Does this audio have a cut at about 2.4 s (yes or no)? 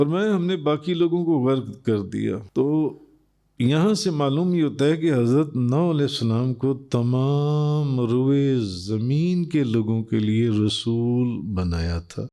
yes